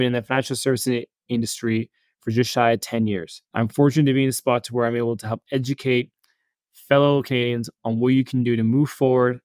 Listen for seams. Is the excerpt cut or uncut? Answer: cut